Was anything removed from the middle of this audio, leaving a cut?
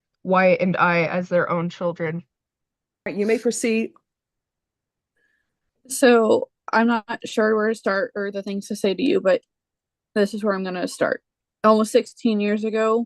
yes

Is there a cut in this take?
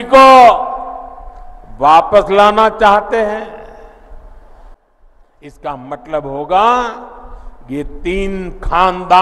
yes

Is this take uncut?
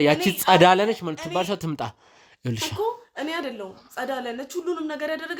yes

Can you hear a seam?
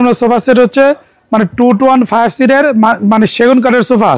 no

